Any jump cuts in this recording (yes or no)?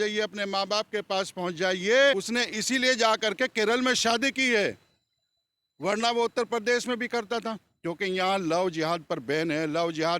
yes